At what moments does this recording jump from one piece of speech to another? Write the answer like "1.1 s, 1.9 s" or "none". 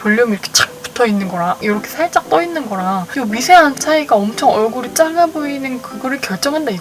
1.6 s, 3.1 s